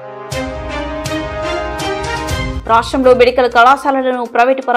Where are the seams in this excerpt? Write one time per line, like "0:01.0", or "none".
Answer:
0:02.5